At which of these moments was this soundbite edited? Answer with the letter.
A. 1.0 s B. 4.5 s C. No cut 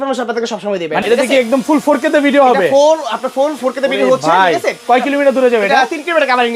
A